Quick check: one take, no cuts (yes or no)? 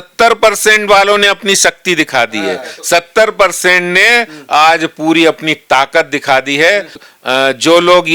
no